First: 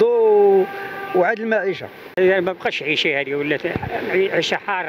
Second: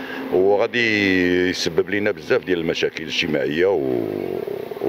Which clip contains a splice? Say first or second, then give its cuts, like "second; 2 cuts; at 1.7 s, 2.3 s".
first; 1 cut; at 2.1 s